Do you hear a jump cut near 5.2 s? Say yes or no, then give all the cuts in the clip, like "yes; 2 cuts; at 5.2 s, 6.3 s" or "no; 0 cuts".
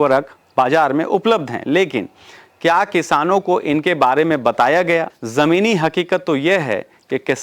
yes; 1 cut; at 5.2 s